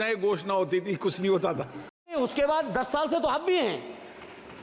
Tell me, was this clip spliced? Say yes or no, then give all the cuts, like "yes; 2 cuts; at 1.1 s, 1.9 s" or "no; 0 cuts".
yes; 1 cut; at 2.1 s